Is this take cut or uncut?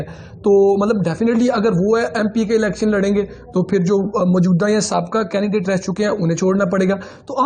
uncut